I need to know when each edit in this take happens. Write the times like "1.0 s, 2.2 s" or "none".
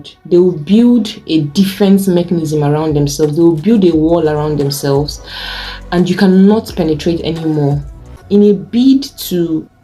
8.1 s